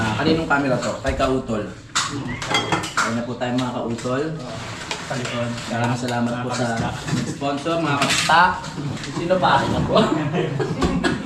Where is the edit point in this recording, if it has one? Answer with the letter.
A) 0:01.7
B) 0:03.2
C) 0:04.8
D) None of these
D